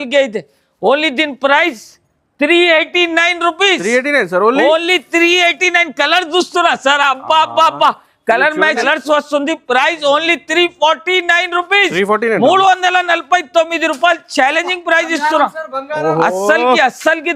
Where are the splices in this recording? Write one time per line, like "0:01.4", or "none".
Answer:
0:08.8

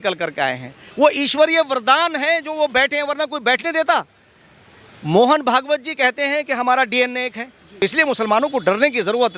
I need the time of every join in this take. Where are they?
0:07.6

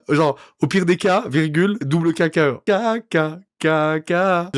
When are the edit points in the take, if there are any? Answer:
0:02.6

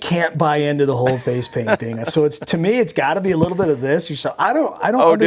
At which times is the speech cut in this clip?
none

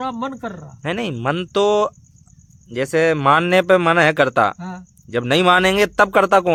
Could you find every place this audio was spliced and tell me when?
none

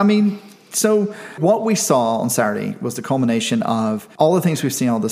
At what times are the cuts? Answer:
0:01.3
0:04.0

